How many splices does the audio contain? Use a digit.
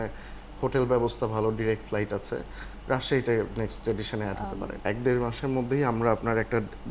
1